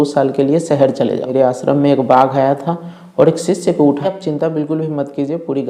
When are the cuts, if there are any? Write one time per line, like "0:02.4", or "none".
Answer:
0:01.3
0:04.0